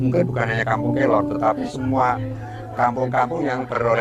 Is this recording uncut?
yes; 0 cuts

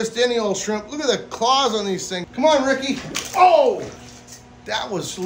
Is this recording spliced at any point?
yes; 1 cut; at 2.2 s

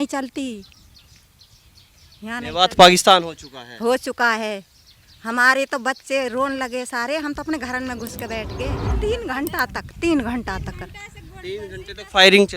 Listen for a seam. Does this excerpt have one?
yes; 1 cut; at 8.8 s

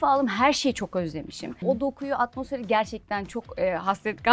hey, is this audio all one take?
no; 1 cut; at 1.6 s

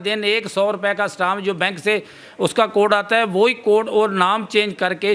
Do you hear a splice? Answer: no; 0 cuts

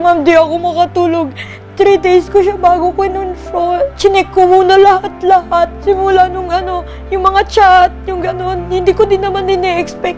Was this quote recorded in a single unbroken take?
yes; 0 cuts

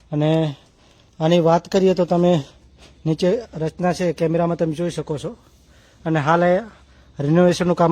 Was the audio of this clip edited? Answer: no; 0 cuts

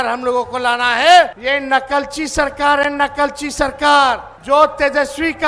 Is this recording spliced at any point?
yes; 2 cuts; at 1.4 s, 4.3 s

